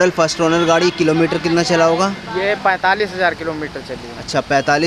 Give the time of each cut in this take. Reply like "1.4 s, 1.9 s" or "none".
none